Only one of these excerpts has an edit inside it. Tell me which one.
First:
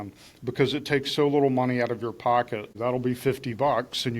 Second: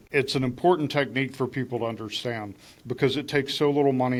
first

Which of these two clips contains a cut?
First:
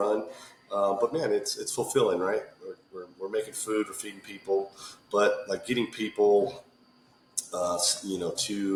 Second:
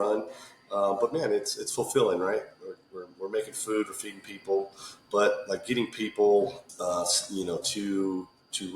second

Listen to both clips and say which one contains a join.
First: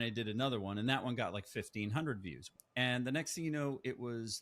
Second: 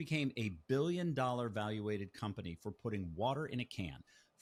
first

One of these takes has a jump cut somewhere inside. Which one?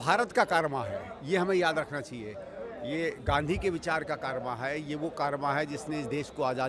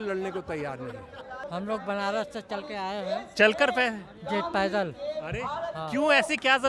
second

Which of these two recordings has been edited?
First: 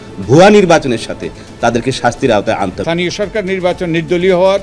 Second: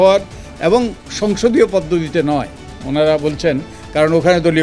first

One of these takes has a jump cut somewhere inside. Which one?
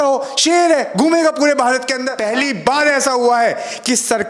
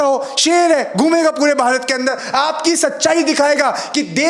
first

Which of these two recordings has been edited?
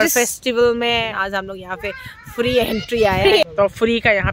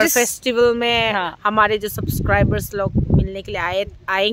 first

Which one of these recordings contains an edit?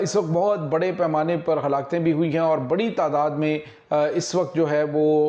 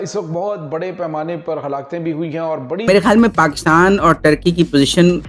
second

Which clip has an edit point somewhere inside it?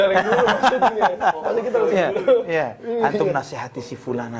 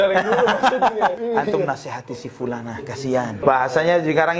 second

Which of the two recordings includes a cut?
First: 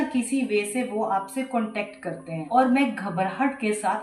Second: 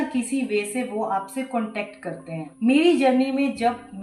first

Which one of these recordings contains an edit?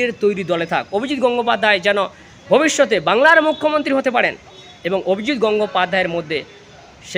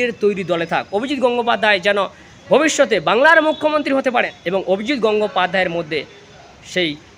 second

